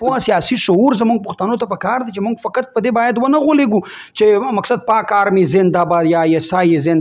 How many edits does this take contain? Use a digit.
0